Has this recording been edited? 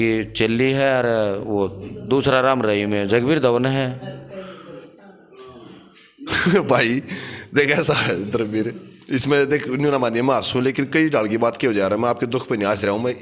no; 0 cuts

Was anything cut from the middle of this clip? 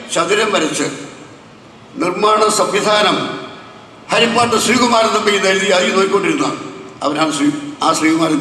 no; 0 cuts

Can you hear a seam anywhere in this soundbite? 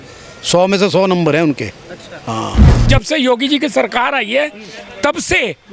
yes; 1 cut; at 2.8 s

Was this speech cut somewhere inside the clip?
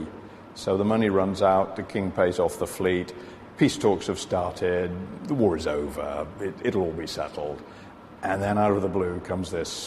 yes; 1 cut; at 4.2 s

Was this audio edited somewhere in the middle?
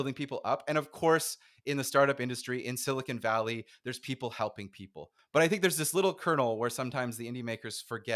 yes; 1 cut; at 5.1 s

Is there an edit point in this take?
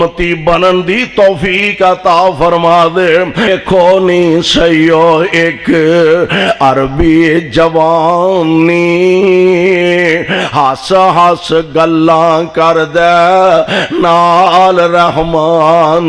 yes; 1 cut; at 3.5 s

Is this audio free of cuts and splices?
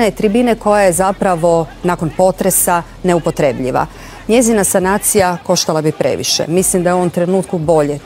yes; 0 cuts

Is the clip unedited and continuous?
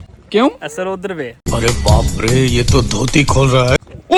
yes; 0 cuts

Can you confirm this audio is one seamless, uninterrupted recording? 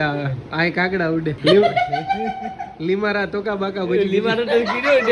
yes; 0 cuts

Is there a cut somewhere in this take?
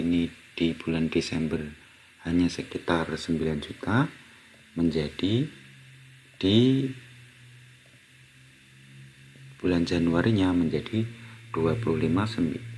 no; 0 cuts

